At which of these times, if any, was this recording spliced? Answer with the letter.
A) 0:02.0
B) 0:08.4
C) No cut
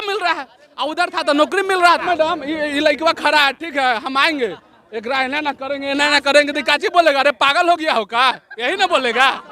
A